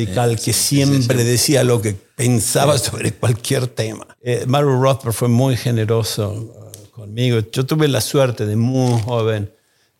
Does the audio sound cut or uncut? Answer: cut